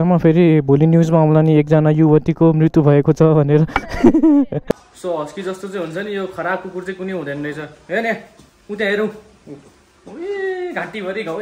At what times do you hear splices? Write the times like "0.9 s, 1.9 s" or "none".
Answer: 4.6 s